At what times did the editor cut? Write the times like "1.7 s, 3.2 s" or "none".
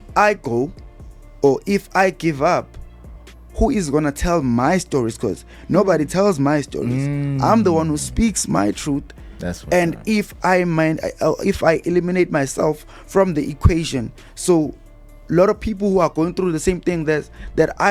none